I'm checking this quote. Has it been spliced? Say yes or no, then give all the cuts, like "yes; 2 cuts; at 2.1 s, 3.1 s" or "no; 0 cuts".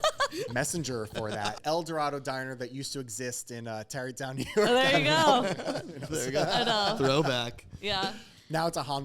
yes; 1 cut; at 1.5 s